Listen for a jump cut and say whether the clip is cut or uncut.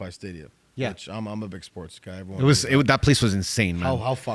uncut